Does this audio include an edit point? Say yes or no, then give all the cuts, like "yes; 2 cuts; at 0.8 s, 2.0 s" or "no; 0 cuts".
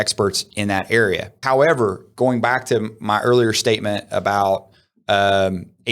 yes; 1 cut; at 1.3 s